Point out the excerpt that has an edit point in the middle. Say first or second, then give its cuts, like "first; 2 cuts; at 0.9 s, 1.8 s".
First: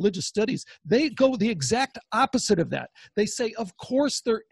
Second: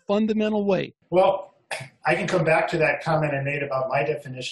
second; 1 cut; at 1.0 s